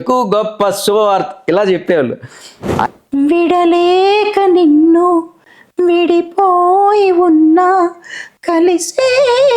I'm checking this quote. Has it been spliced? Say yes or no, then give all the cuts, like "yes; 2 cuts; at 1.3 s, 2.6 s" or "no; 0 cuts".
yes; 1 cut; at 2.9 s